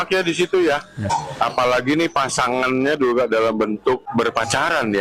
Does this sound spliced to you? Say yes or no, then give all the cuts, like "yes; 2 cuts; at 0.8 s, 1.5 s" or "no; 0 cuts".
yes; 2 cuts; at 1.1 s, 4.1 s